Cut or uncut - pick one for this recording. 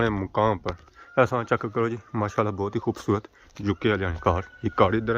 cut